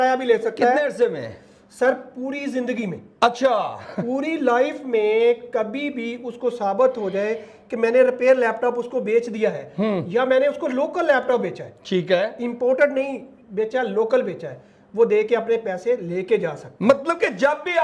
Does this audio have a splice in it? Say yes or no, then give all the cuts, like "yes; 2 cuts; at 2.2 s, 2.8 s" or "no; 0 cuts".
no; 0 cuts